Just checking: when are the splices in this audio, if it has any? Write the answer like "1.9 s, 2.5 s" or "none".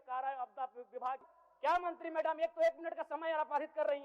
1.3 s